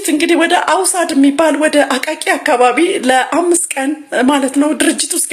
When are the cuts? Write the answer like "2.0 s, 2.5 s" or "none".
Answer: none